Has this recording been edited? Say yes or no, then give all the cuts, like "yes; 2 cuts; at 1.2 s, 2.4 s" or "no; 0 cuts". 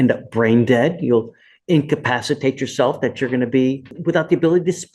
yes; 1 cut; at 3.9 s